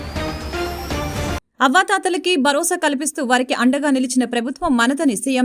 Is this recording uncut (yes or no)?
no